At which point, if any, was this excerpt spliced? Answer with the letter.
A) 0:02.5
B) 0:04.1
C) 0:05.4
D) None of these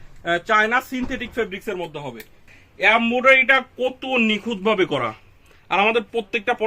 A